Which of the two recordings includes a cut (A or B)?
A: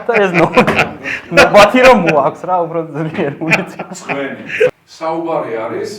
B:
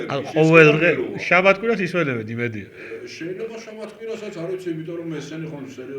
A